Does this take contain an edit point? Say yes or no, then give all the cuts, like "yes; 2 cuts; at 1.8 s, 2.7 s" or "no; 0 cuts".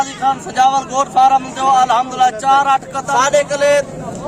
yes; 1 cut; at 3.0 s